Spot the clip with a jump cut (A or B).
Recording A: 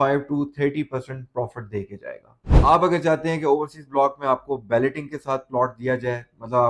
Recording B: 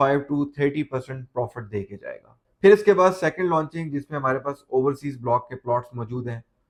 A